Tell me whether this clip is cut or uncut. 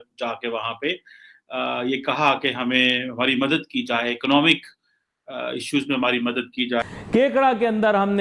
cut